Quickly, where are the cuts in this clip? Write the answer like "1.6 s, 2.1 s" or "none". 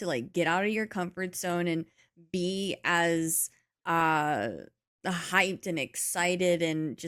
none

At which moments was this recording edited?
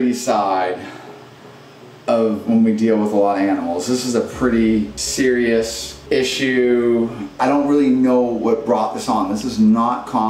5.0 s, 5.9 s, 7.3 s

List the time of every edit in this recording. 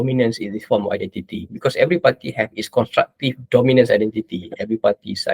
none

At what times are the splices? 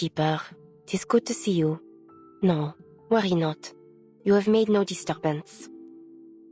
5.5 s

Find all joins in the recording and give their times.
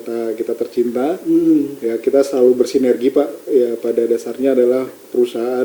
none

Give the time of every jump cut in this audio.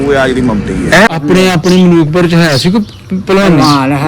1.1 s

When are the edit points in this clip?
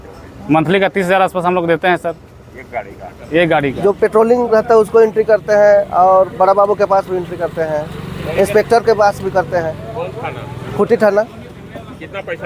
3.8 s

